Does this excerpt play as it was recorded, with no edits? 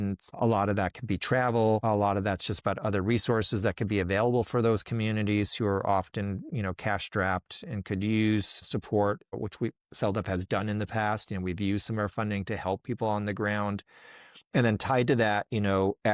yes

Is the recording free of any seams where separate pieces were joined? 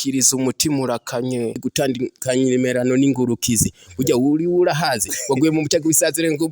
no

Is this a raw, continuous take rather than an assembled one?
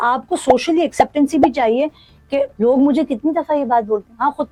yes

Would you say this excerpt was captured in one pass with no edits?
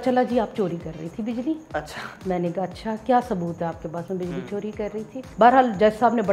no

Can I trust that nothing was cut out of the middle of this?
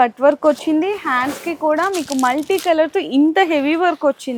yes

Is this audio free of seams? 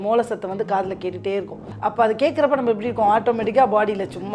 no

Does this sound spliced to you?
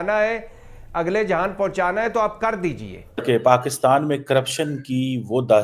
yes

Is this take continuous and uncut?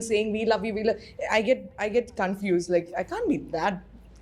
yes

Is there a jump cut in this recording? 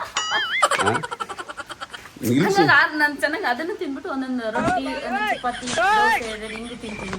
no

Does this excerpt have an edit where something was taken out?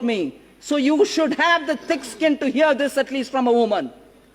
no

